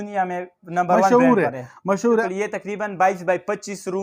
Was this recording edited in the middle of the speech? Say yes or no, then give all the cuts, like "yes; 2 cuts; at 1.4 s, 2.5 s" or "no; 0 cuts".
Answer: yes; 1 cut; at 2.2 s